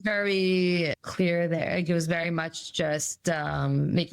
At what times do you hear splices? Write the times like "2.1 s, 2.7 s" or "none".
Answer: 1.0 s